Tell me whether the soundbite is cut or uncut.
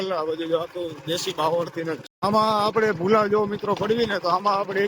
cut